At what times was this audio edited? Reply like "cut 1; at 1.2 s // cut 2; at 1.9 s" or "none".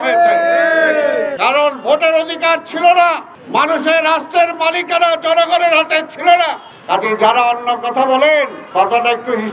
cut 1; at 1.3 s // cut 2; at 3.3 s // cut 3; at 6.7 s // cut 4; at 8.6 s